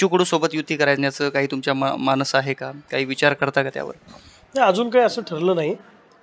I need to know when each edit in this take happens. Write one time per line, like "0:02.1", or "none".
none